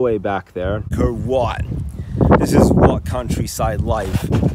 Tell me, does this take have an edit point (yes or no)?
yes